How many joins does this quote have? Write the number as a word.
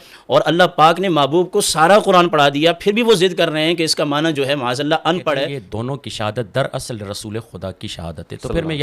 one